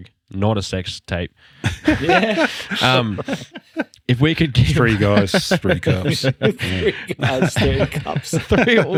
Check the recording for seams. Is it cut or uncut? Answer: uncut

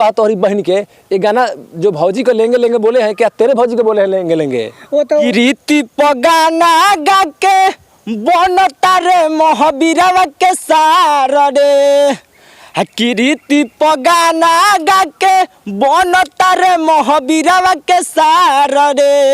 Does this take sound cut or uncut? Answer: cut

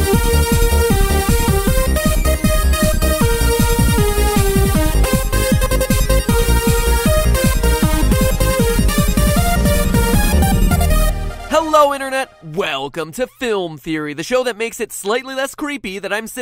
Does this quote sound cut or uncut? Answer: cut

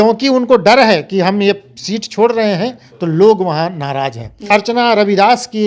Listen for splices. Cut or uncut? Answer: cut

